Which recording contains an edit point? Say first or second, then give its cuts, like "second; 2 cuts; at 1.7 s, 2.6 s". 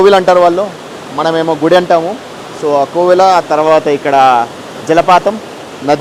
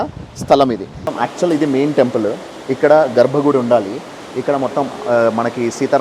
second; 1 cut; at 0.9 s